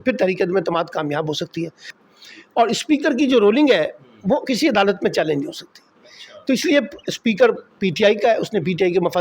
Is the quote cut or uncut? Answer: cut